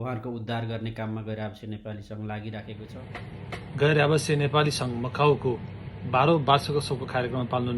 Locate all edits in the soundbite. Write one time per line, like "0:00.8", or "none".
0:02.9